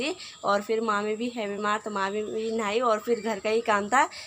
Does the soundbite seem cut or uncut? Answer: uncut